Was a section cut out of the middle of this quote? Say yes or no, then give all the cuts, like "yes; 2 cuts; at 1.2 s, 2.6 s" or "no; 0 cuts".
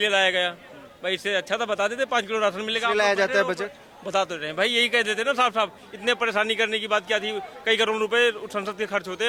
no; 0 cuts